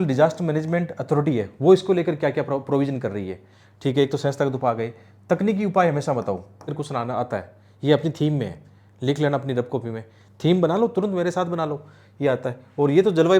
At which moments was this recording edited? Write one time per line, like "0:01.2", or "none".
0:06.8